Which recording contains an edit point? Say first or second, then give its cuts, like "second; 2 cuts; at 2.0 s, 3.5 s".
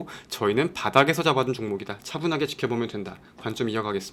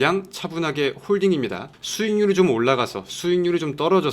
second; 1 cut; at 1.8 s